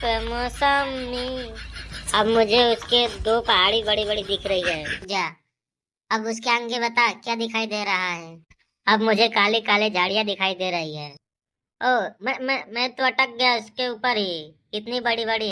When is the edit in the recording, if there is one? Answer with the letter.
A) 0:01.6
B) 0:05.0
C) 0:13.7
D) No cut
B